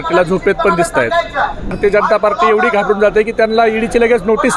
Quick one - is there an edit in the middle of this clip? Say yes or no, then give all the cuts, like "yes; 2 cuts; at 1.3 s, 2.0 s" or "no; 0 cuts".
yes; 1 cut; at 1.7 s